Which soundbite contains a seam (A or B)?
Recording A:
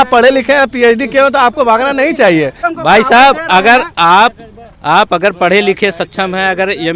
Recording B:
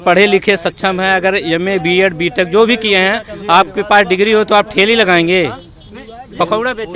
A